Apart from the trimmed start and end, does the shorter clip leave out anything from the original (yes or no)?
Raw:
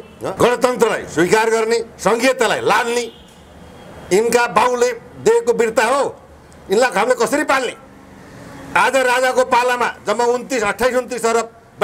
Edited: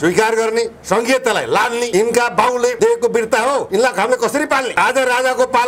yes